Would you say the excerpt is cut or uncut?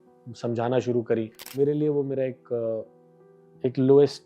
cut